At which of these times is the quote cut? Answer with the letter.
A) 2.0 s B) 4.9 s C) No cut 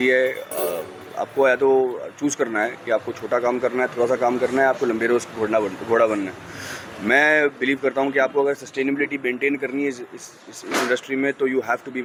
C